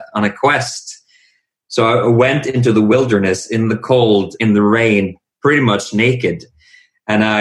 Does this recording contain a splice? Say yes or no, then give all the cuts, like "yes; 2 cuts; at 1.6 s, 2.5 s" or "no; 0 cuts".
no; 0 cuts